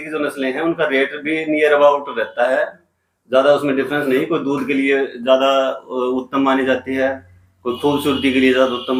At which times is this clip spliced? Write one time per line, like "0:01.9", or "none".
none